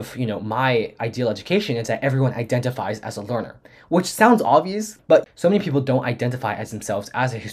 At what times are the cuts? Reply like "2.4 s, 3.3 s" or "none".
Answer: 5.0 s